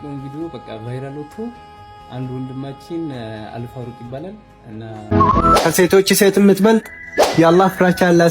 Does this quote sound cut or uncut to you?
cut